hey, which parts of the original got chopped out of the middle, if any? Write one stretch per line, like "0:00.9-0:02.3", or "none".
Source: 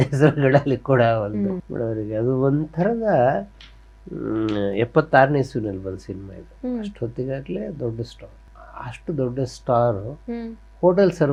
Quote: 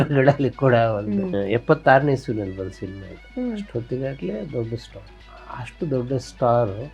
0:01.6-0:04.6